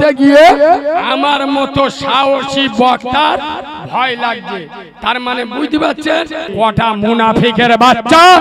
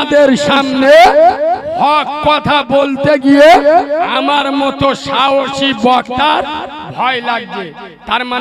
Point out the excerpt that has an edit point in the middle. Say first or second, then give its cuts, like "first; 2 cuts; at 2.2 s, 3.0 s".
first; 1 cut; at 6.4 s